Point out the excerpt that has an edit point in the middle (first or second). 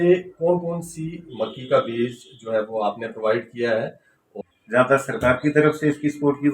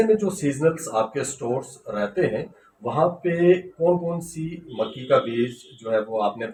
first